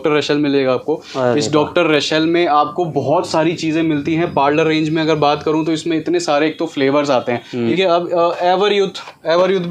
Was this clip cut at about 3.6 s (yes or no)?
no